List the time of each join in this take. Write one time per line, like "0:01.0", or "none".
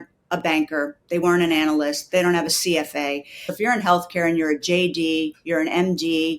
0:03.5